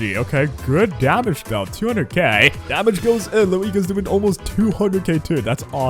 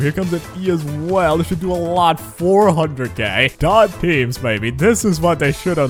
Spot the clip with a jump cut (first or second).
first